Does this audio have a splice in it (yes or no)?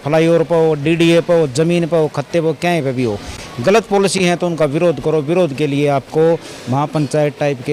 no